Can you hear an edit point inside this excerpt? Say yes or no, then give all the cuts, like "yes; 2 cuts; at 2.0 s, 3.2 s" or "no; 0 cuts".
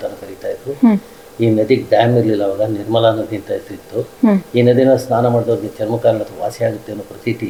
no; 0 cuts